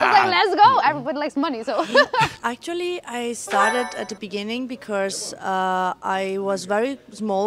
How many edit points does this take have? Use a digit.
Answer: 0